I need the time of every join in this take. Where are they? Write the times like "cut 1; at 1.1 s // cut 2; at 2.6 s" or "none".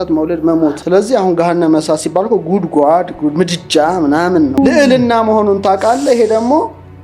cut 1; at 0.8 s // cut 2; at 4.6 s